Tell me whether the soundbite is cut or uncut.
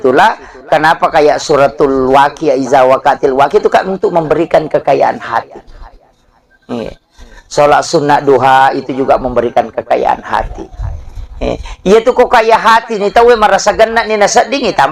uncut